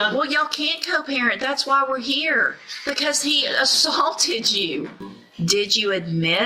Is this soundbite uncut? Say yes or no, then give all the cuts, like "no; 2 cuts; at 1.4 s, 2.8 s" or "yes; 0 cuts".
no; 1 cut; at 5.2 s